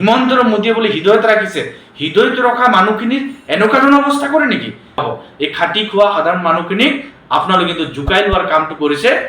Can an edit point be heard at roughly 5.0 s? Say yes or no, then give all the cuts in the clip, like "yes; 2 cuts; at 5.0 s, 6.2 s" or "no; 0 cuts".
yes; 1 cut; at 5.0 s